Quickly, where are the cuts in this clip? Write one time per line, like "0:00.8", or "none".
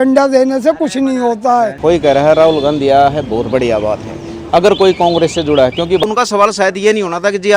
0:01.8
0:05.6